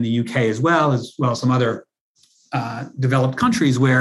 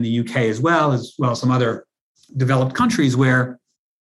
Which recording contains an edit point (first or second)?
second